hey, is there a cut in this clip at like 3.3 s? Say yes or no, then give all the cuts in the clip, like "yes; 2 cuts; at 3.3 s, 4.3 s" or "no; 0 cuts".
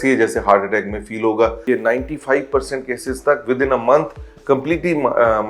no; 1 cut; at 1.6 s